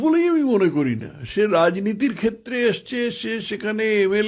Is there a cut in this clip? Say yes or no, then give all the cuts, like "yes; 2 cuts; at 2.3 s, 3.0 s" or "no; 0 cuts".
no; 0 cuts